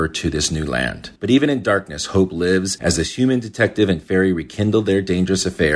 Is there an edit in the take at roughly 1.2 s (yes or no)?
no